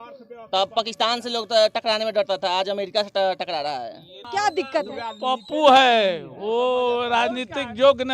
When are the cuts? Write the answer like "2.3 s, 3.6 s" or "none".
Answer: 4.3 s